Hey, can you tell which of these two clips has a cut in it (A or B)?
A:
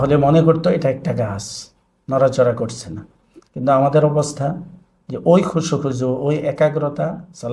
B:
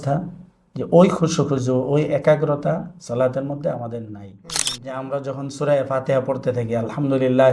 B